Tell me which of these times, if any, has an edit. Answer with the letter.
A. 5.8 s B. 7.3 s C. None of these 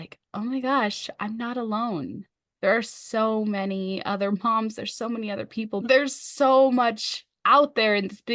A